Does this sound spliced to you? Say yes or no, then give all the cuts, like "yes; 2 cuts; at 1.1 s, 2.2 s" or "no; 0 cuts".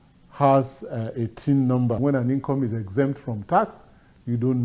yes; 1 cut; at 2.0 s